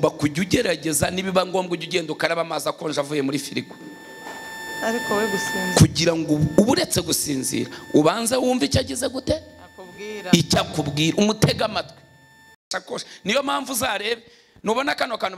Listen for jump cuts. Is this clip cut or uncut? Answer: cut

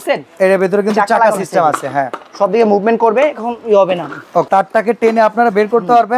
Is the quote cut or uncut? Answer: cut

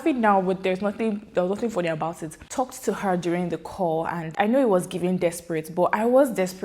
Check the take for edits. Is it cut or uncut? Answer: cut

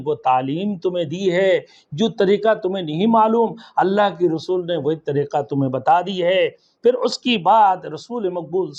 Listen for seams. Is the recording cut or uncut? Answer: uncut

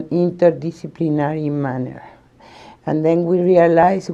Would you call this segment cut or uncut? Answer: uncut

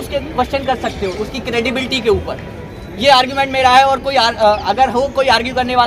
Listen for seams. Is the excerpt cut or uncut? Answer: uncut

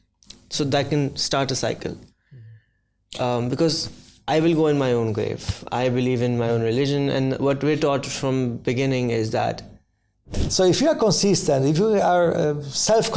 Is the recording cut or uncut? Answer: cut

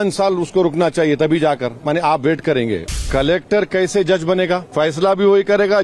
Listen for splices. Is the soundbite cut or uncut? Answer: cut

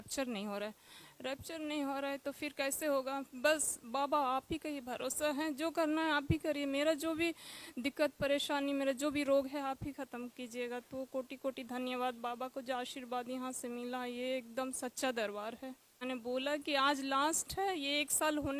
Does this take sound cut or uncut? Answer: cut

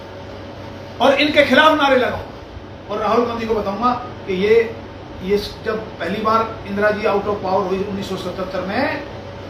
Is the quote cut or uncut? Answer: uncut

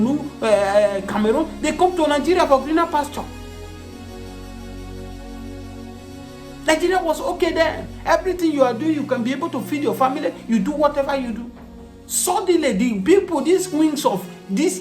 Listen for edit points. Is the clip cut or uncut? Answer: cut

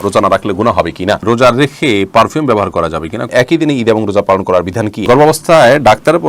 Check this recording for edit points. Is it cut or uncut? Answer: cut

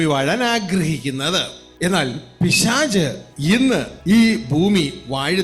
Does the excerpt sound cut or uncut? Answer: cut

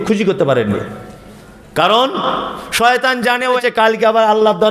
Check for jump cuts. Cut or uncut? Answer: cut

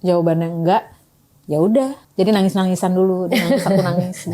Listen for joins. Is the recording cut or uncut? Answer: cut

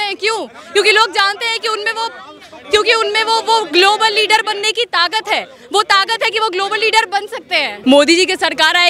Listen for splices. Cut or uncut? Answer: cut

